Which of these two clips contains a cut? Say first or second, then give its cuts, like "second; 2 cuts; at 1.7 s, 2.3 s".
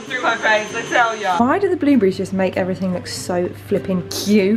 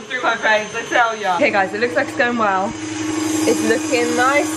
first; 1 cut; at 1.4 s